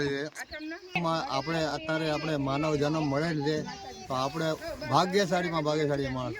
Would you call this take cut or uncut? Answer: cut